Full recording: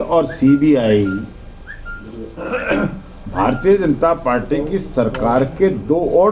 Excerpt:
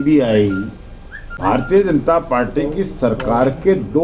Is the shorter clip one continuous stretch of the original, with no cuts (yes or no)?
no